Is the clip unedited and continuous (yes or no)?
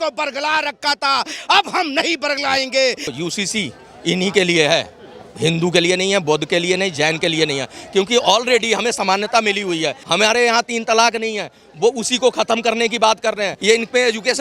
no